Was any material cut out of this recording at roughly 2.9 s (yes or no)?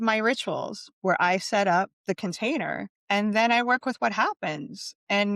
yes